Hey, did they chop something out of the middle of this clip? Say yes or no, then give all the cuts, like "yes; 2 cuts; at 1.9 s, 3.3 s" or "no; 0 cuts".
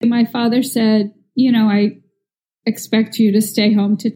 no; 0 cuts